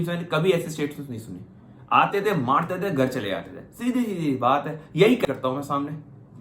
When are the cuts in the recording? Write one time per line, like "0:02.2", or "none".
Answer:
0:05.3